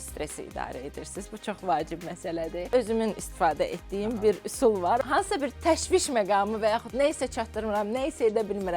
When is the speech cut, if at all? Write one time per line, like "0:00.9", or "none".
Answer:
0:02.7
0:05.0